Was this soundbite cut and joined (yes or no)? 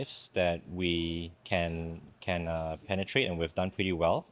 no